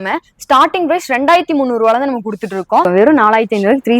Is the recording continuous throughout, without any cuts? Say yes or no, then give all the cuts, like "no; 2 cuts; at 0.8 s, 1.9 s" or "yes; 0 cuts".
no; 1 cut; at 2.9 s